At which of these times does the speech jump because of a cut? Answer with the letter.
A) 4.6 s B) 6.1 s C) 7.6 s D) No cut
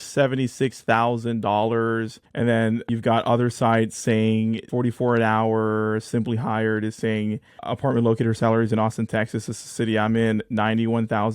C